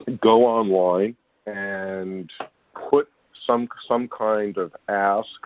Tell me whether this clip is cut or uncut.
uncut